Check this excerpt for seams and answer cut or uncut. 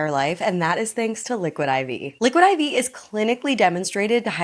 cut